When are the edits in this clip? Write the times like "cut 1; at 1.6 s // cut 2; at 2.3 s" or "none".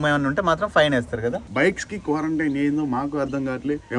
cut 1; at 1.4 s